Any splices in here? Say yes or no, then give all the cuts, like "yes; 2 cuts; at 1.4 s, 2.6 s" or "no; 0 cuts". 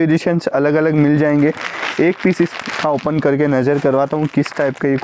no; 0 cuts